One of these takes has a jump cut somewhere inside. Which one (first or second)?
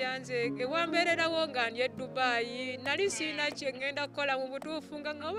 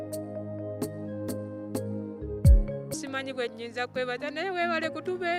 second